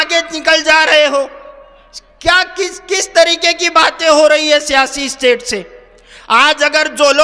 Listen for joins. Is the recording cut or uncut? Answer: uncut